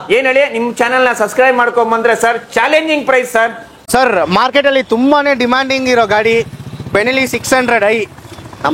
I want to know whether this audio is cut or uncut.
cut